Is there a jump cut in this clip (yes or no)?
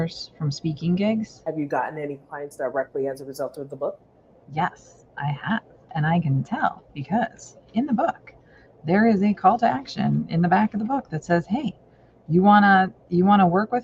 yes